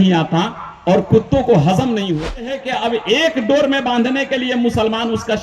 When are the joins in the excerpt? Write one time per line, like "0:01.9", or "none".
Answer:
0:02.6

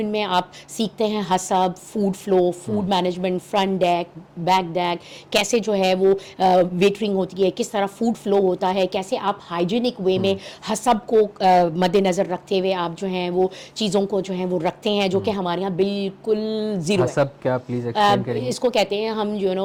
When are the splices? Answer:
none

